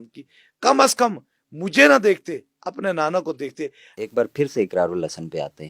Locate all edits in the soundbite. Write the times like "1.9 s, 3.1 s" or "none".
3.9 s

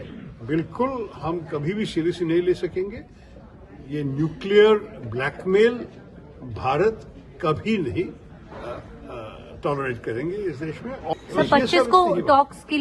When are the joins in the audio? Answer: 11.1 s

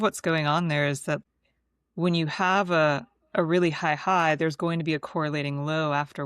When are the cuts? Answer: 1.2 s

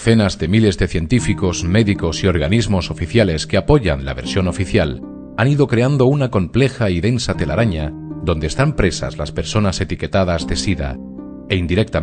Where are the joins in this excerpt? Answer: none

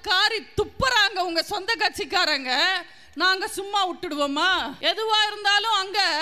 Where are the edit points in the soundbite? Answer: 4.7 s

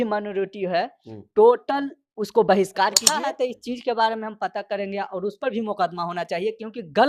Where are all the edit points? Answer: 3.1 s

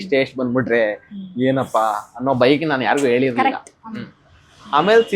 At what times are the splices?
none

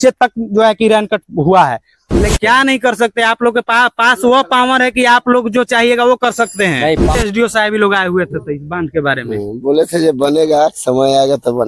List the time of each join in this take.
2.3 s, 7.2 s

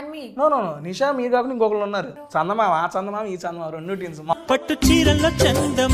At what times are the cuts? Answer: 2.2 s, 4.3 s

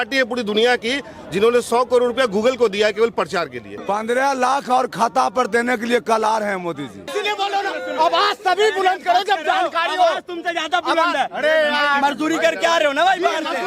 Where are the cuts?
3.7 s, 7.1 s

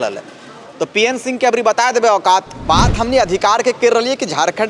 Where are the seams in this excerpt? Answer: 2.5 s

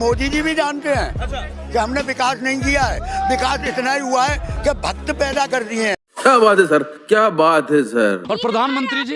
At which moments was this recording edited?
6.1 s, 8.2 s

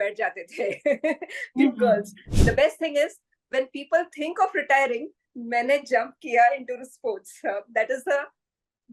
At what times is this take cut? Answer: 2.2 s

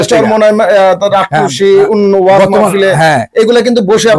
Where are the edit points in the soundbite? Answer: none

